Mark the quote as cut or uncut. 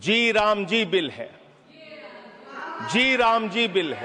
uncut